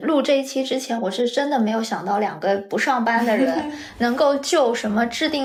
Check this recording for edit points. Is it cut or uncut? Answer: uncut